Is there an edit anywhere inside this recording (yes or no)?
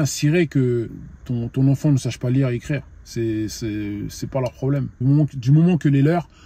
no